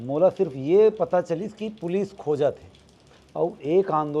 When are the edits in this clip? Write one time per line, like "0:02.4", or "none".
none

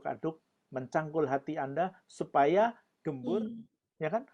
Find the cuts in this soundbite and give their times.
0:03.2

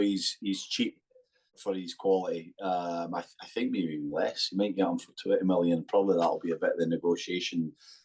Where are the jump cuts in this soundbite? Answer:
none

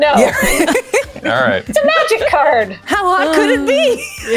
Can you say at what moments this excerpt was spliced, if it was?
0:02.8

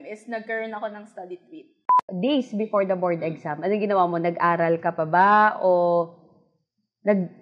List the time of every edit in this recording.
0:01.9

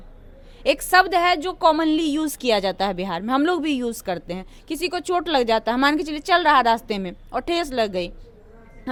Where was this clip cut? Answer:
none

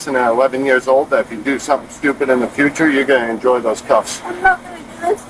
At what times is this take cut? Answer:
none

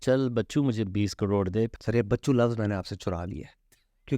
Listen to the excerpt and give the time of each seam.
0:01.8

